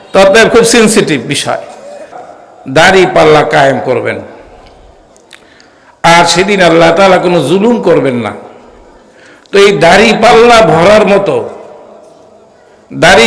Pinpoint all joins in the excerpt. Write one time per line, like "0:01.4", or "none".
0:02.1